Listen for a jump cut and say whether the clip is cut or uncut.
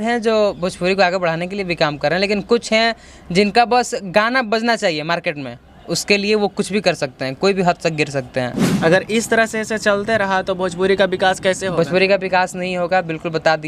cut